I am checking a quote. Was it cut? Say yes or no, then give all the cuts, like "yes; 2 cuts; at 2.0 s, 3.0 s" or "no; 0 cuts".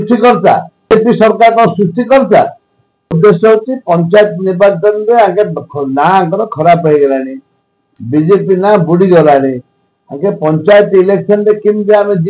yes; 2 cuts; at 0.9 s, 3.1 s